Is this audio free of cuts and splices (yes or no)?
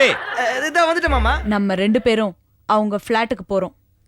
no